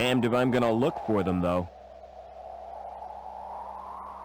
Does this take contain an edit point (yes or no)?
yes